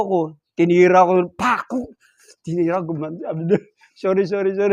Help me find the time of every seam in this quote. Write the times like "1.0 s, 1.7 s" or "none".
none